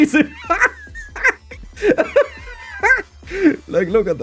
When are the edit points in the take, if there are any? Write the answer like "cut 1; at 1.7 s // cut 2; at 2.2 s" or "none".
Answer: cut 1; at 3.1 s